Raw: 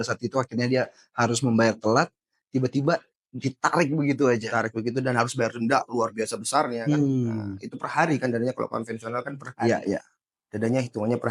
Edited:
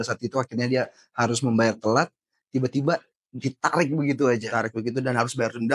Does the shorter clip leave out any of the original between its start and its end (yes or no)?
no